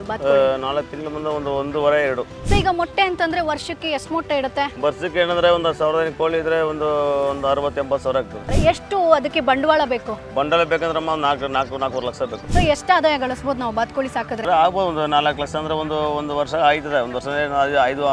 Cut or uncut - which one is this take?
cut